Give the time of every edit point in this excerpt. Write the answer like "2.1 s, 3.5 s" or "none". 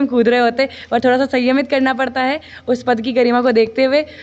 none